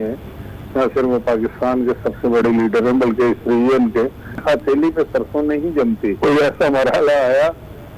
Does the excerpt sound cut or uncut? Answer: cut